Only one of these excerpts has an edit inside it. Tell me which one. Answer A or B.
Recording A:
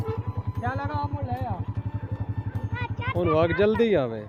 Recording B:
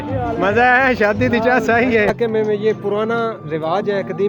B